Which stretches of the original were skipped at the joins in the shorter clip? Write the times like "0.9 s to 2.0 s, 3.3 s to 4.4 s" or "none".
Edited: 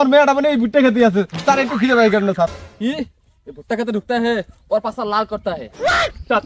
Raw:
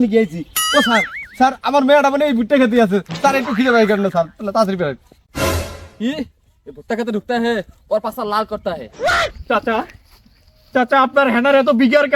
4.3 s to 5.8 s